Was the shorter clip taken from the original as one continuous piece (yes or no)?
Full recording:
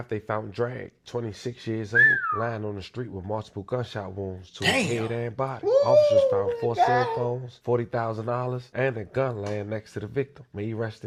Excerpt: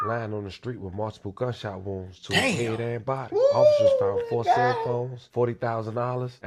yes